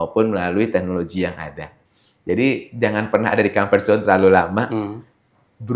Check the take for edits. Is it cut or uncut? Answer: cut